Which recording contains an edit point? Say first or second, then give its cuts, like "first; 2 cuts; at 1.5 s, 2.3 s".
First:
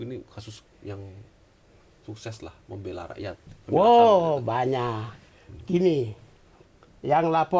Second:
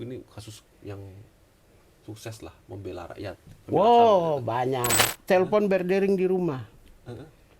second; 1 cut; at 5.2 s